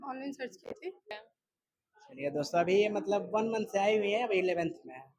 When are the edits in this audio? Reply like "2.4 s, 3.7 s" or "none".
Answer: 1.3 s